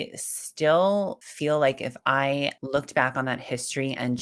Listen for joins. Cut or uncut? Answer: cut